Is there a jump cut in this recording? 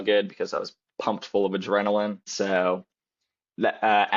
yes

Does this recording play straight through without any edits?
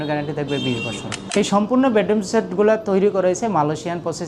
no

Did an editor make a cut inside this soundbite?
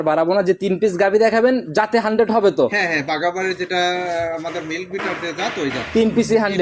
no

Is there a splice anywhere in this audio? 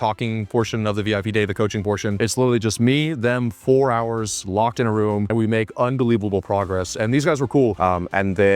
yes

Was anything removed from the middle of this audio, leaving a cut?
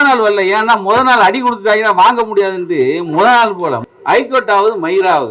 yes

